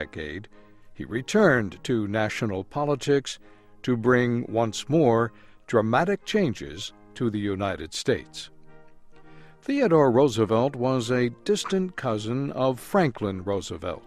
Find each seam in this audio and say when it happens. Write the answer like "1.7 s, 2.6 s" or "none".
3.9 s